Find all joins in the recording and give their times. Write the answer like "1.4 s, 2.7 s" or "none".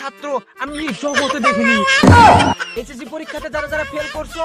2.7 s